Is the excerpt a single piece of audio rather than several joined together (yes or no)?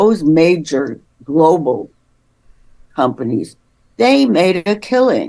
yes